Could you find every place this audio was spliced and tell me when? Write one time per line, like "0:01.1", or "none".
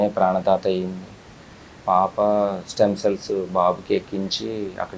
0:01.7